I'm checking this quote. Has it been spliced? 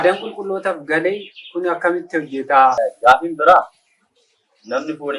yes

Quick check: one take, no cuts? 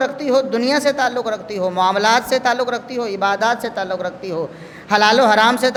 yes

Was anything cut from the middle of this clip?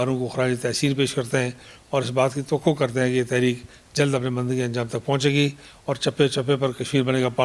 no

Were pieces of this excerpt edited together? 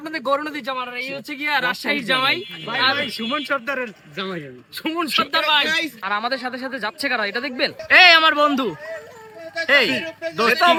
no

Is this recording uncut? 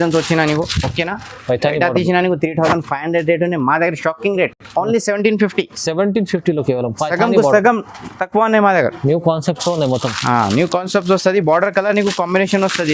yes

